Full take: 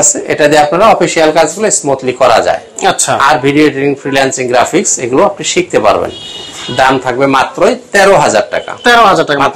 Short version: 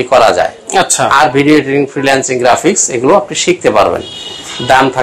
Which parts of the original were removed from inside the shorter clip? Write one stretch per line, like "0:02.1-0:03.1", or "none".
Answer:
none

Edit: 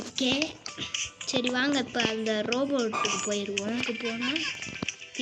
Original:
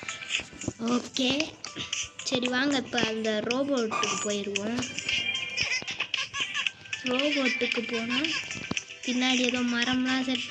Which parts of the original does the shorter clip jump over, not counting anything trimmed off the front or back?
0:04.8-0:07.7

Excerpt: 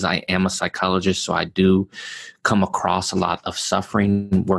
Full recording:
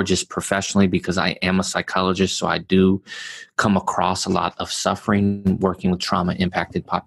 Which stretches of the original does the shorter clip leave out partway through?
none

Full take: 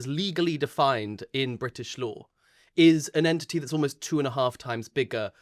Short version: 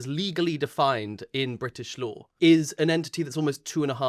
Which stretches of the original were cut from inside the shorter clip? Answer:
0:02.2-0:02.6

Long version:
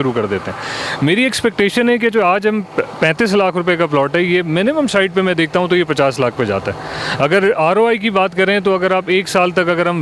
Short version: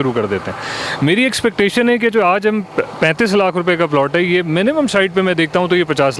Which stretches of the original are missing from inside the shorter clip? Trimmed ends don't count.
none

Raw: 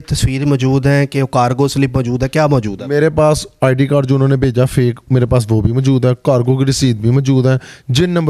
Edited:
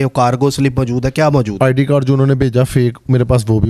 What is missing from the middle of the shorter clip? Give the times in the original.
0:02.7-0:03.5

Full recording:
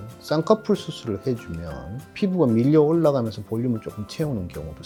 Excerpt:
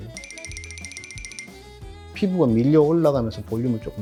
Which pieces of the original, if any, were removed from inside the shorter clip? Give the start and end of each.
none

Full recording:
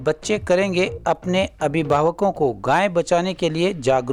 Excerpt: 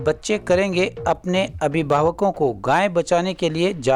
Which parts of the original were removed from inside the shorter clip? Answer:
none

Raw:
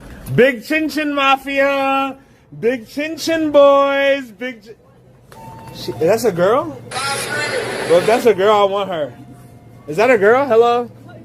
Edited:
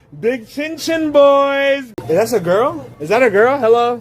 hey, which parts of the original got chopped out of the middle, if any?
0:04.3-0:05.8
0:06.8-0:09.8

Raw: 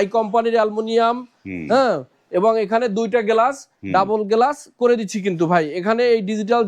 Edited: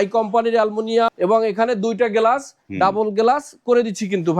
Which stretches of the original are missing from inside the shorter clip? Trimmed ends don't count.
0:01.1-0:02.3

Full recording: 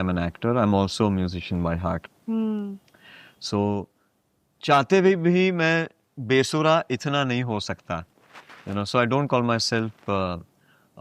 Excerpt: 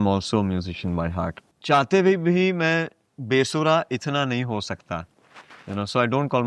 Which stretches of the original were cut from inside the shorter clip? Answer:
0:02.1-0:04.4

